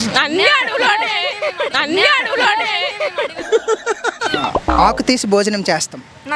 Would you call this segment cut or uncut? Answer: cut